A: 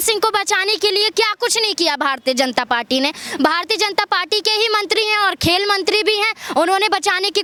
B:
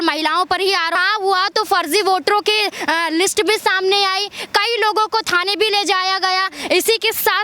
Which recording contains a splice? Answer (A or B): B